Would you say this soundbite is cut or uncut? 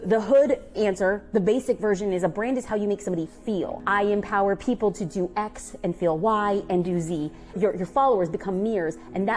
cut